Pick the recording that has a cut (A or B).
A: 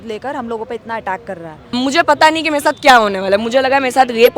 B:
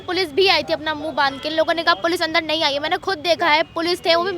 A